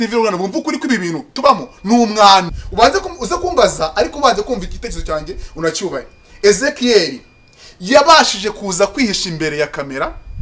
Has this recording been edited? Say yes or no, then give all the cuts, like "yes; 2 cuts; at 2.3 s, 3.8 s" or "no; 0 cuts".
yes; 1 cut; at 2.5 s